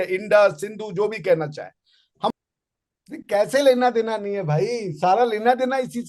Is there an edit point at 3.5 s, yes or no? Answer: no